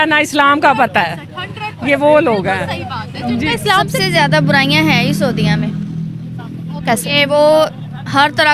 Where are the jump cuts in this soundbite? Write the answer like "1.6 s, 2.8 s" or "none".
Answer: 3.9 s